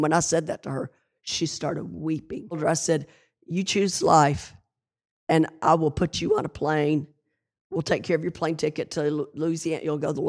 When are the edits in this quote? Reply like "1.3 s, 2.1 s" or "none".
2.6 s